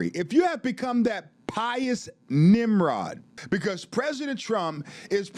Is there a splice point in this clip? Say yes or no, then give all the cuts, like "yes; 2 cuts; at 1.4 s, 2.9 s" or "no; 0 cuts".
yes; 1 cut; at 3.3 s